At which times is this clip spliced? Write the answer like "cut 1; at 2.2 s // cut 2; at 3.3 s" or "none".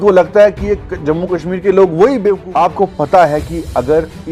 cut 1; at 2.4 s